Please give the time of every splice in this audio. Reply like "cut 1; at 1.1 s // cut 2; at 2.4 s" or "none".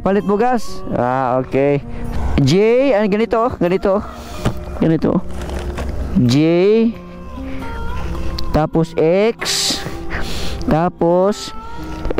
cut 1; at 2.0 s

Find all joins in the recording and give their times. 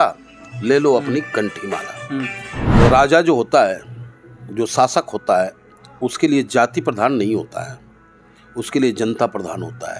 cut 1; at 2.6 s

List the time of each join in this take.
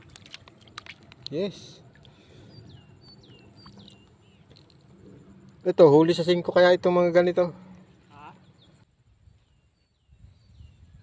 cut 1; at 8.8 s

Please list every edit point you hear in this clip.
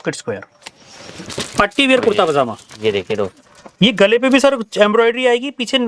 cut 1; at 1.3 s

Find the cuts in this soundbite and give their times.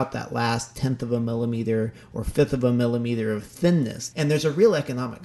cut 1; at 4.0 s

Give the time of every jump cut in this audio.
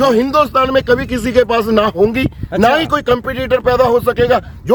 none

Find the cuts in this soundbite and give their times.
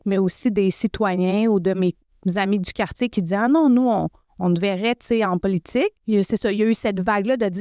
cut 1; at 2.1 s // cut 2; at 4.2 s // cut 3; at 6.0 s

